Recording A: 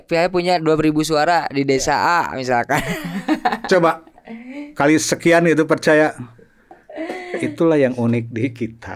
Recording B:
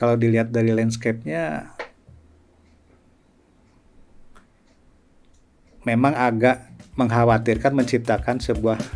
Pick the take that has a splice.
A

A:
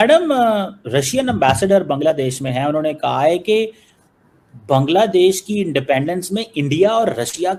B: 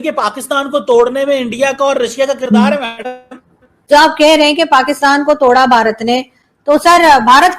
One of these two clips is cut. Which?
B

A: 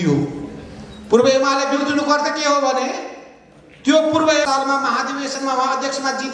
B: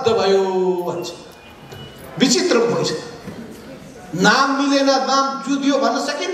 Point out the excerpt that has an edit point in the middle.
A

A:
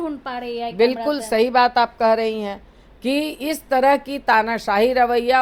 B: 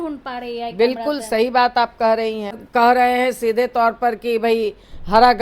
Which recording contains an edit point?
B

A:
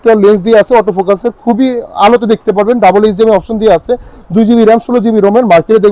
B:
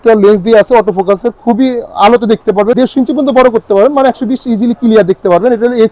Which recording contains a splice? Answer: B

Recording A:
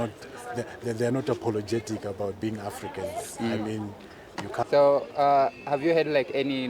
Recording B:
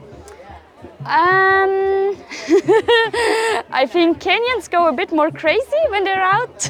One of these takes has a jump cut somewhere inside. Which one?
A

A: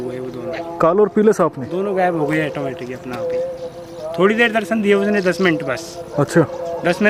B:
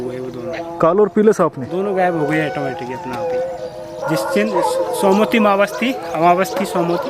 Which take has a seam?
B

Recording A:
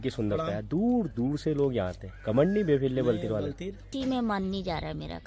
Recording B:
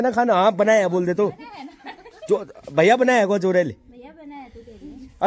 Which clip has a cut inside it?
A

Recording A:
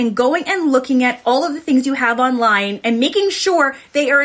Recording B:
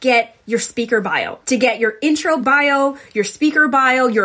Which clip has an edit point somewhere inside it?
B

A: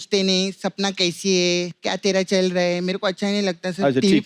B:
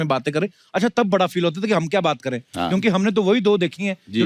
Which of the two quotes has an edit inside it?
A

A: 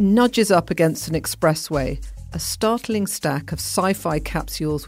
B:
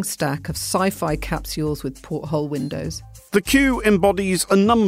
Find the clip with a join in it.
B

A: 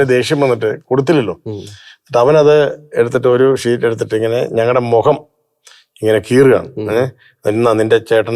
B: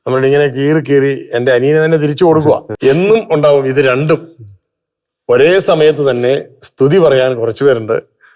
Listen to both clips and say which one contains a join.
B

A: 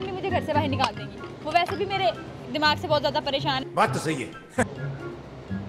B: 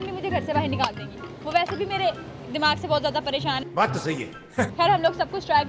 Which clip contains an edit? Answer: A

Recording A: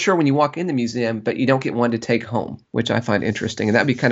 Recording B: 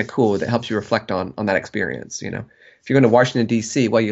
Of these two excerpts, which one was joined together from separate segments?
A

